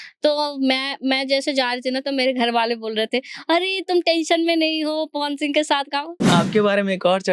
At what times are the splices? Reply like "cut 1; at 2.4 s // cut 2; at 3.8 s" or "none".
cut 1; at 6.3 s